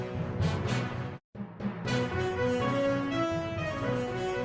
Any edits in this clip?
yes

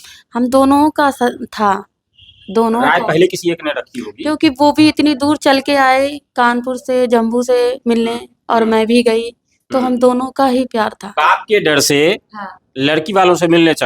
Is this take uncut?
no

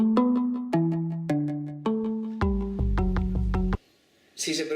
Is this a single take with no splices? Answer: yes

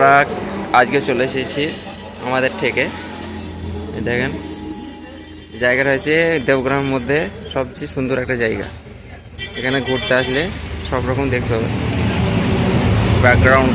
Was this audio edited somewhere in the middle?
no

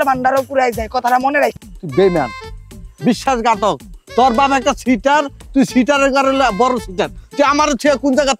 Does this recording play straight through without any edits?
no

